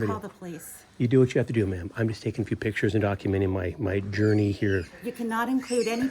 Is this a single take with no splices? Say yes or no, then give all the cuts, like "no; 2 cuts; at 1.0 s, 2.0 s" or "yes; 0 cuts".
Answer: yes; 0 cuts